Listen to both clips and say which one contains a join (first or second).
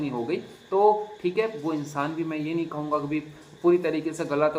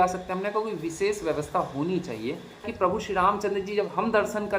second